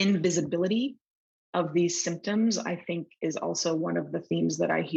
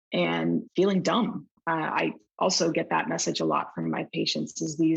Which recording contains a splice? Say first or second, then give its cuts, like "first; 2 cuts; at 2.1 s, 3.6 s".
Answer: second; 1 cut; at 1.9 s